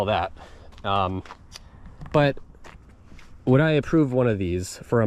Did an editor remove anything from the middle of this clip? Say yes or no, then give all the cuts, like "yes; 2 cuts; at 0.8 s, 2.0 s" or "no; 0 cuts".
no; 0 cuts